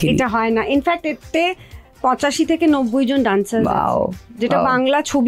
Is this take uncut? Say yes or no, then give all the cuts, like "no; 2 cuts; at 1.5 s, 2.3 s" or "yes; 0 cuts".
yes; 0 cuts